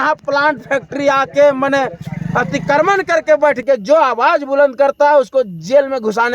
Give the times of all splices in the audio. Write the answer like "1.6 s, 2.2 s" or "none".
3.6 s